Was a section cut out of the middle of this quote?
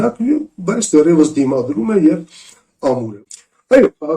yes; 1 cut; at 3.1 s

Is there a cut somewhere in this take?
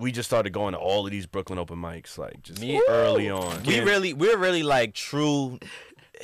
yes; 1 cut; at 3.6 s

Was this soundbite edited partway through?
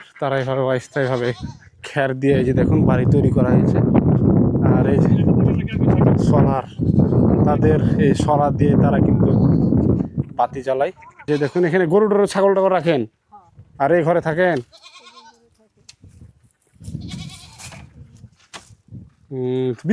yes; 1 cut; at 11.1 s

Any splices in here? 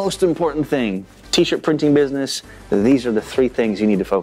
no; 0 cuts

